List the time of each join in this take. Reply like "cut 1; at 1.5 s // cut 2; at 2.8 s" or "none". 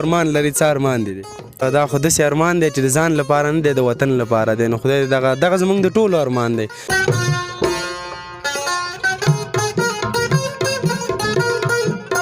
cut 1; at 1.6 s // cut 2; at 7.0 s